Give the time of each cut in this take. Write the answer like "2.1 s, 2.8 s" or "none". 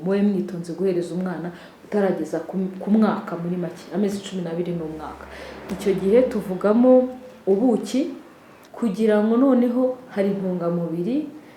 8.5 s